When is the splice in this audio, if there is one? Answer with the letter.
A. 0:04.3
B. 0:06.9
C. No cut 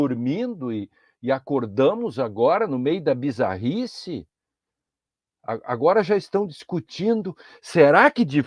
C